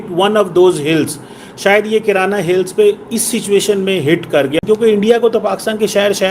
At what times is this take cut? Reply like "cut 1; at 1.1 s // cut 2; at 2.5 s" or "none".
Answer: cut 1; at 4.6 s